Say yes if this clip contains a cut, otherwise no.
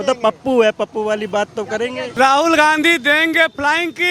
yes